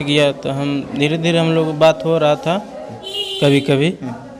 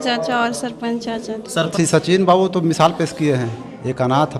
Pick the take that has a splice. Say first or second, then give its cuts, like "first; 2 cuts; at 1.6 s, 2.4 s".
second; 1 cut; at 1.7 s